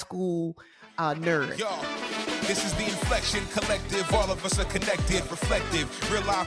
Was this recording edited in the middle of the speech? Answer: yes; 1 cut; at 1.5 s

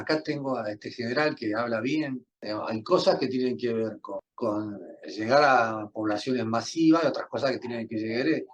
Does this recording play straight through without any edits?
no; 2 cuts; at 2.3 s, 4.3 s

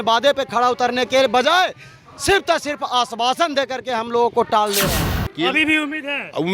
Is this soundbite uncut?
no; 1 cut; at 5.2 s

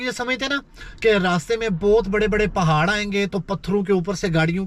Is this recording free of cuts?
yes; 0 cuts

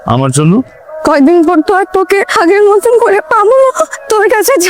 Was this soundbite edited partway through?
no; 0 cuts

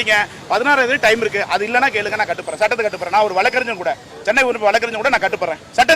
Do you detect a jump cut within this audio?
no; 0 cuts

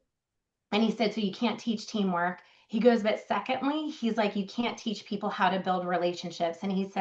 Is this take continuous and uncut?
yes; 0 cuts

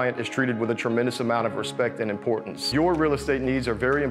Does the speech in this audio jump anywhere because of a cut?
yes; 1 cut; at 2.6 s

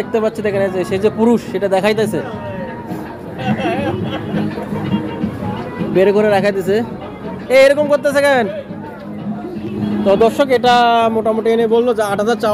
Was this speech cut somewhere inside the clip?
no; 0 cuts

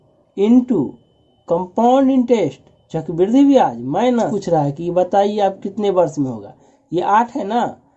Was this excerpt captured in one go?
no; 1 cut; at 4.4 s

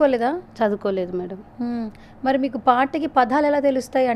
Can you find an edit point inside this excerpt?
no; 0 cuts

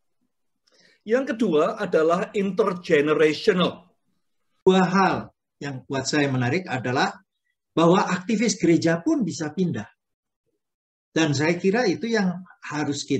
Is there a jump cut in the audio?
yes; 1 cut; at 4.7 s

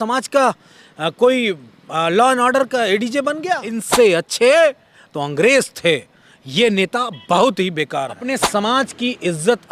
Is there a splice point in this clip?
yes; 2 cuts; at 3.8 s, 8.3 s

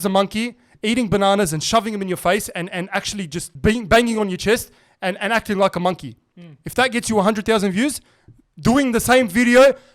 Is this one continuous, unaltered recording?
no; 1 cut; at 3.4 s

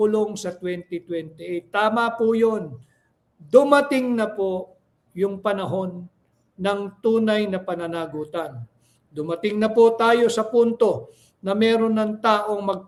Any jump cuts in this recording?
no; 0 cuts

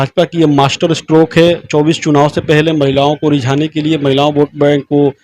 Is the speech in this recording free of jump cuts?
yes; 0 cuts

